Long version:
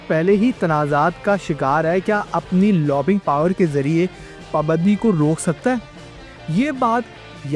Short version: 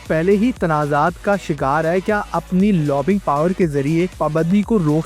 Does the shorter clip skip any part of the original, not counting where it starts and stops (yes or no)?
yes